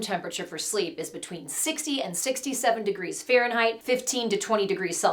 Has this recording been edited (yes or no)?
no